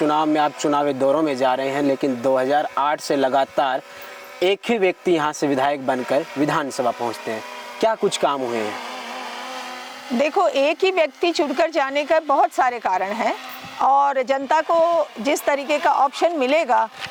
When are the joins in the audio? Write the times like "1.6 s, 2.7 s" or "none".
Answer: none